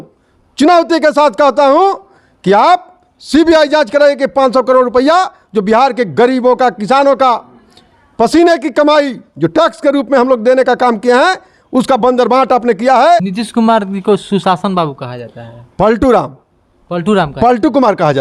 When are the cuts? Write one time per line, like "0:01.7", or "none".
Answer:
0:13.3

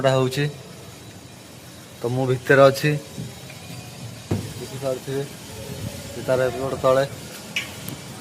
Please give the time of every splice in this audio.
0:04.3

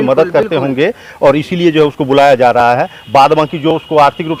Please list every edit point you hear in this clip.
none

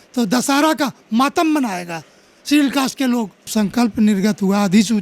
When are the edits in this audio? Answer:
0:03.5

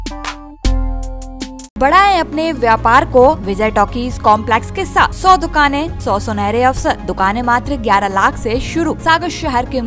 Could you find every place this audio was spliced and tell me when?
0:01.8
0:03.5
0:05.2
0:05.9
0:07.1
0:09.0

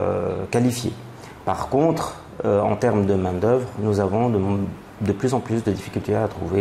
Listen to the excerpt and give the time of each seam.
none

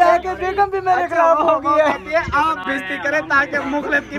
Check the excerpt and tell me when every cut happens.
none

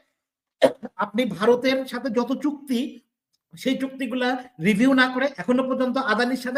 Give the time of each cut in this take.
none

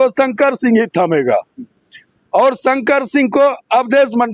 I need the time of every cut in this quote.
none

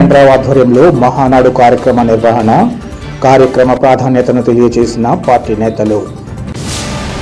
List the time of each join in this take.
none

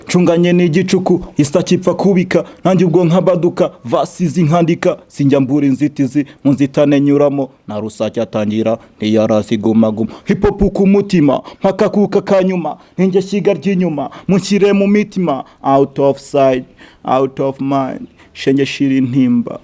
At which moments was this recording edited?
none

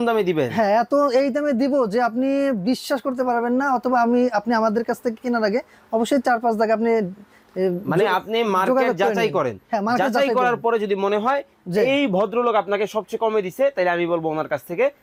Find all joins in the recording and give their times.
none

